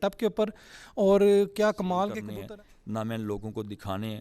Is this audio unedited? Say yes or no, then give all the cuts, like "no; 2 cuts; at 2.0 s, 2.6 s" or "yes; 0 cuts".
no; 1 cut; at 2.1 s